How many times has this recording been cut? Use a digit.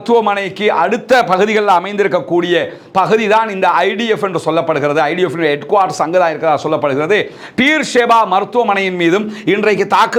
0